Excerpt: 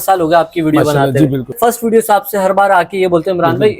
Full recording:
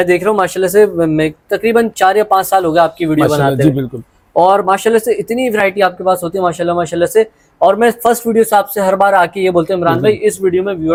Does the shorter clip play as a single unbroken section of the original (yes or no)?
no